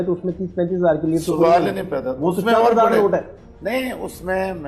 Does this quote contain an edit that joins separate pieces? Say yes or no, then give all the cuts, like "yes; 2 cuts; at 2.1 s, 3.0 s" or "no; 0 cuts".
no; 0 cuts